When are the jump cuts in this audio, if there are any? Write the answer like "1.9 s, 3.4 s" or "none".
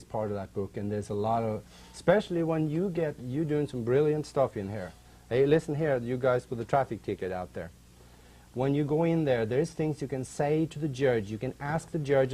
11.3 s